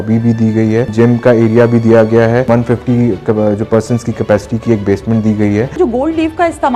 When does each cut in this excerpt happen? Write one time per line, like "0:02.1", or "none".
0:00.9
0:02.5
0:05.8